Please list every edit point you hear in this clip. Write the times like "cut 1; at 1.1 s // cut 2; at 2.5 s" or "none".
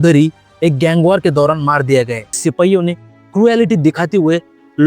cut 1; at 2.4 s